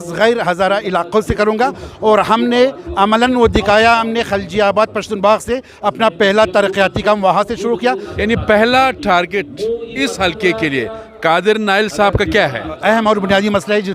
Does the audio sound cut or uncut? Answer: cut